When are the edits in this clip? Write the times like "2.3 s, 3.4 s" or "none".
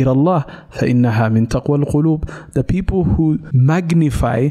3.5 s